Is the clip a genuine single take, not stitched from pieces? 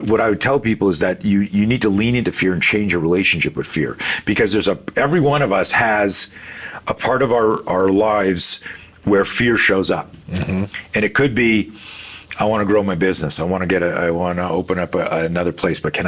yes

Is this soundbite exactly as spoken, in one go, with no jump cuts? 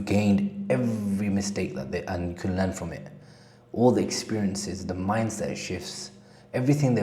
yes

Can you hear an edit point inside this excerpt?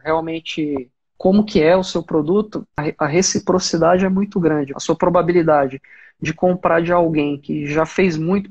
yes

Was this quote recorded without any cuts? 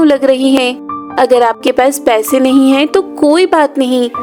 yes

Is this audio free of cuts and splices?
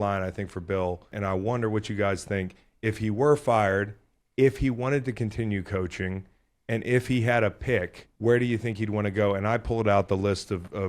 no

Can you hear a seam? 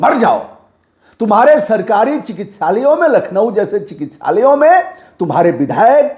no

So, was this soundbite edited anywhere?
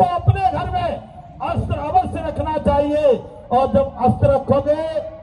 no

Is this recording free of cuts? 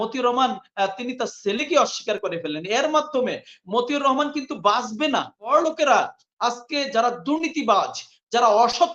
no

